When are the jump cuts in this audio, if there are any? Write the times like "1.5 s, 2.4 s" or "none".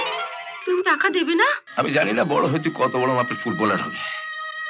1.6 s